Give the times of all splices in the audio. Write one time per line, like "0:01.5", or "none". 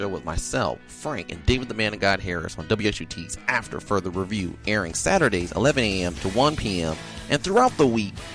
0:05.4